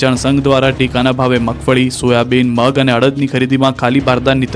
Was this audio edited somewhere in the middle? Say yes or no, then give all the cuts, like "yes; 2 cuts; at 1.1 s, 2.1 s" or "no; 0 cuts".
no; 0 cuts